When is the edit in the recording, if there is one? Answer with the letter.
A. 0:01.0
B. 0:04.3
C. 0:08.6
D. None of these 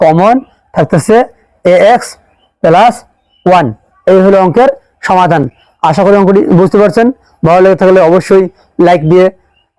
D